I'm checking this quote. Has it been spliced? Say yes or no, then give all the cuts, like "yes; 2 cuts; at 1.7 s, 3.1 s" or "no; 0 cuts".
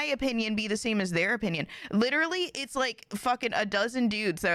no; 0 cuts